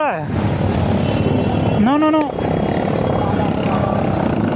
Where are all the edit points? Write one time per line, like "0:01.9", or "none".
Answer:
none